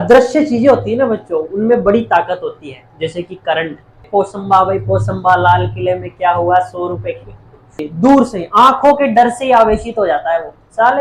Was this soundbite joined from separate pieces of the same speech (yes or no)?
yes